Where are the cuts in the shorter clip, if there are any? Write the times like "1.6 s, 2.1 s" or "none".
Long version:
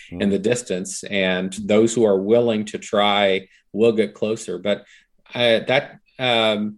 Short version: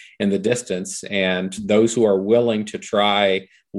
none